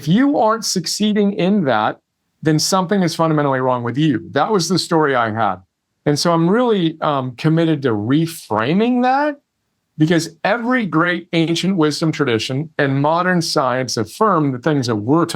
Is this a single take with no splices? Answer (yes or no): yes